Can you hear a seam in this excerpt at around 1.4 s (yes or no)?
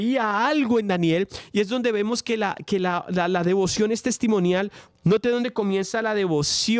no